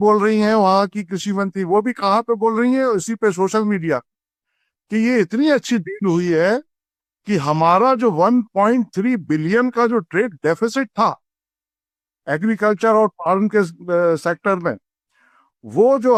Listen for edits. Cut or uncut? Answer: uncut